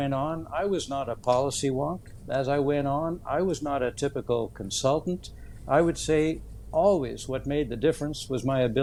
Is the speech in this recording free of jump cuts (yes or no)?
yes